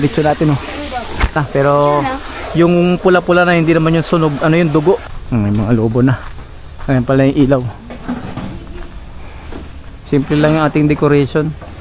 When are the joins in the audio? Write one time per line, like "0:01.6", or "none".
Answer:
0:01.3
0:05.1